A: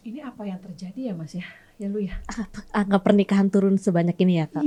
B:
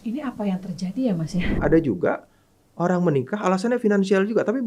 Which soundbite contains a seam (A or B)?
B